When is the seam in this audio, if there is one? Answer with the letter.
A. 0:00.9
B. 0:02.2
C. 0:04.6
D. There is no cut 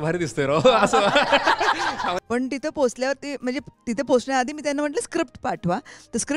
B